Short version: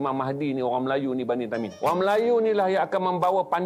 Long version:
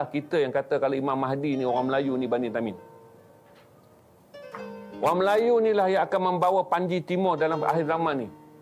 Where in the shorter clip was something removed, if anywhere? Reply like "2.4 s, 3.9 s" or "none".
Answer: 1.7 s